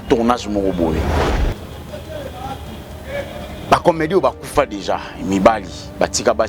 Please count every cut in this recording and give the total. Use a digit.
1